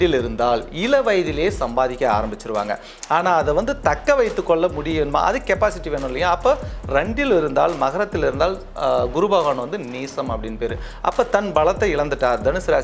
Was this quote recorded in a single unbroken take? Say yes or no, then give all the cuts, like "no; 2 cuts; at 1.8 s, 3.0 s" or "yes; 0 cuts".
yes; 0 cuts